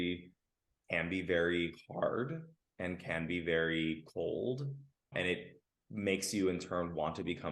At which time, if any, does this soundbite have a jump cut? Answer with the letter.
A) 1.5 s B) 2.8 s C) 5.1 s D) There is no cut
C